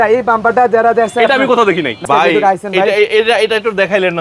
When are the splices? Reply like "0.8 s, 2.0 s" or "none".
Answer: 2.0 s